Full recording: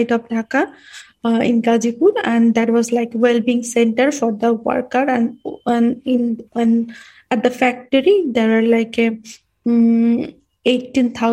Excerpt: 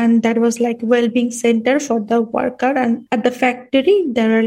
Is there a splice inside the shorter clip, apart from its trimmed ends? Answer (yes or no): yes